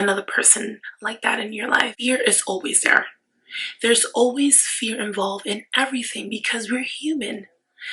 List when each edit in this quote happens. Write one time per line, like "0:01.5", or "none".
0:01.9